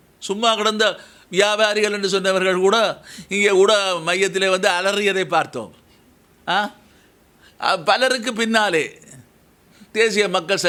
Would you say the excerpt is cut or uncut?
uncut